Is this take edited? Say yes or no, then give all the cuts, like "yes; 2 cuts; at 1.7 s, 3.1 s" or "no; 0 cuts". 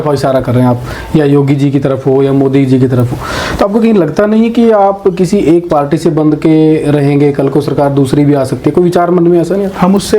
no; 0 cuts